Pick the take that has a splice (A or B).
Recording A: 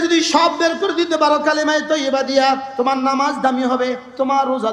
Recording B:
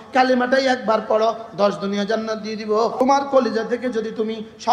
B